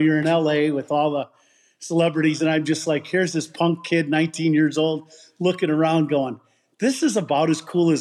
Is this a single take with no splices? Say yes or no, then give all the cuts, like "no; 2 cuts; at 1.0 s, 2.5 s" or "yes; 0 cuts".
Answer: yes; 0 cuts